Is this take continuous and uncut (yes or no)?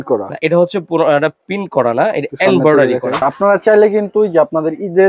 no